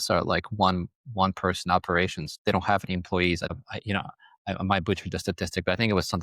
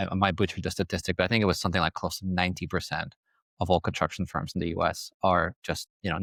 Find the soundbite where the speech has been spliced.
first; 2 cuts; at 2.3 s, 3.5 s

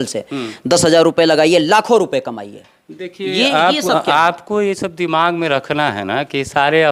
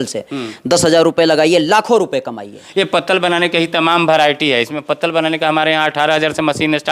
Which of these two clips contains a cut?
second; 1 cut; at 2.6 s

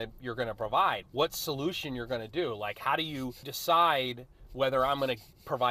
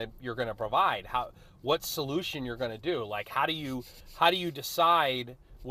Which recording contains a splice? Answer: first; 2 cuts; at 1.0 s, 3.5 s

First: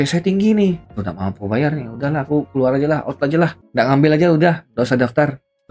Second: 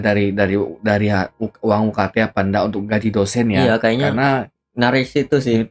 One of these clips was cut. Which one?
first; 2 cuts; at 0.9 s, 3.6 s

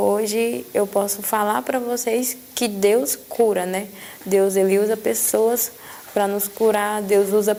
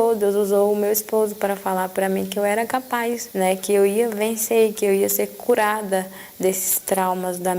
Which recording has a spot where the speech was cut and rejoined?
second; 1 cut; at 3.2 s

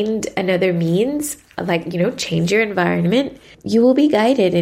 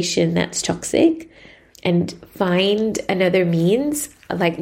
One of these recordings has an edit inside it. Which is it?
first; 1 cut; at 3.5 s

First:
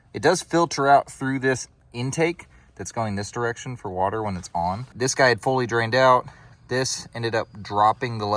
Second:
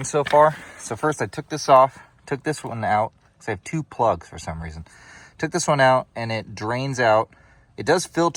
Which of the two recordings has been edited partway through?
first; 2 cuts; at 1.7 s, 4.9 s

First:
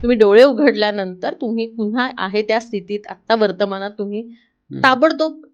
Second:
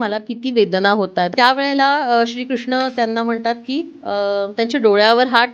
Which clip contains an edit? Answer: second; 1 cut; at 1.3 s

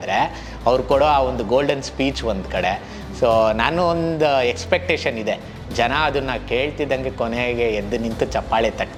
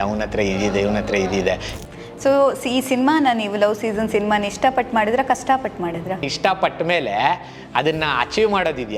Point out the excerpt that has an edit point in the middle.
second; 2 cuts; at 1.7 s, 6.3 s

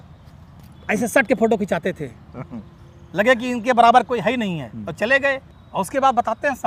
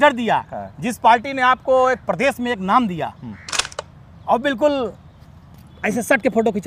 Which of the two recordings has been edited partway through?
first; 1 cut; at 5.5 s

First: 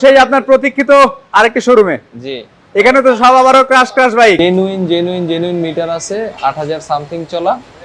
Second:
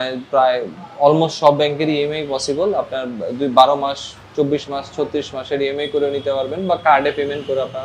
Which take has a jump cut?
first; 1 cut; at 4.4 s

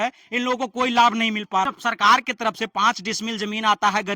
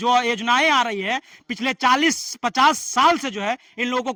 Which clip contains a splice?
first; 1 cut; at 1.6 s

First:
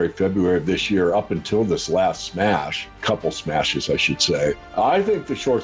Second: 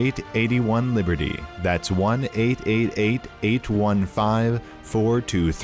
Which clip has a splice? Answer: first; 2 cuts; at 3.0 s, 4.6 s

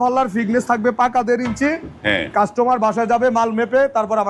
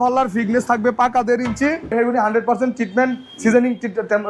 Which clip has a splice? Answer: second; 1 cut; at 1.9 s

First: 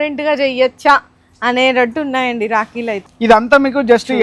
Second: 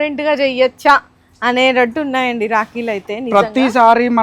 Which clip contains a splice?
first; 1 cut; at 3.0 s

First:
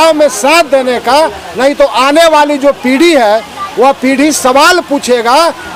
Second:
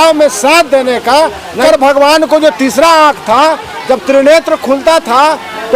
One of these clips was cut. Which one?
second; 1 cut; at 1.6 s

